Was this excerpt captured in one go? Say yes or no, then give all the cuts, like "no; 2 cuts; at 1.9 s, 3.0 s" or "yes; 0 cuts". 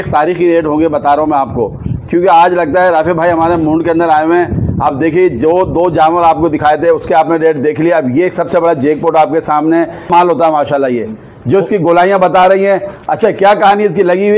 no; 1 cut; at 10.1 s